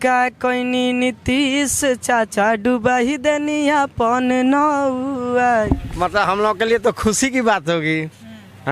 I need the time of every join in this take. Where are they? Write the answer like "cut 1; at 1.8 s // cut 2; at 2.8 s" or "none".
cut 1; at 5.7 s